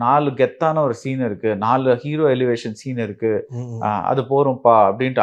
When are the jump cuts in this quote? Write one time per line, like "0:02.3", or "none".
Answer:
none